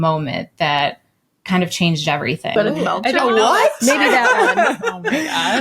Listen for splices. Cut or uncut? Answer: cut